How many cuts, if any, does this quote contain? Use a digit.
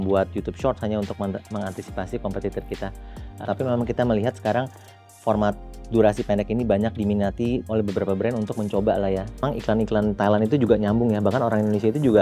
2